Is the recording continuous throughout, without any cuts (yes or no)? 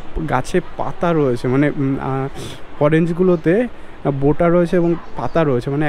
yes